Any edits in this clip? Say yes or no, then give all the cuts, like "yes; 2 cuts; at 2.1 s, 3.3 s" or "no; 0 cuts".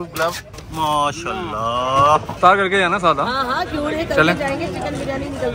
yes; 1 cut; at 2.3 s